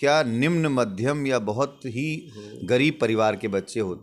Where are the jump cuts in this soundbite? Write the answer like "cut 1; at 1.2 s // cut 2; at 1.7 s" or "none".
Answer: none